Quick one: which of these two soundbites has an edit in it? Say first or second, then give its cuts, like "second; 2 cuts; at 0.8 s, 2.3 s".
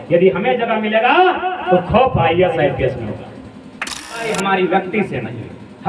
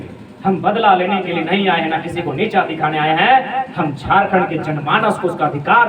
first; 1 cut; at 4.2 s